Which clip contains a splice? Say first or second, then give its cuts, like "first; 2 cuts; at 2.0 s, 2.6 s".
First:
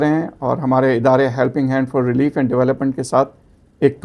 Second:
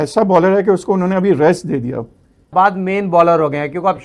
second; 1 cut; at 2.5 s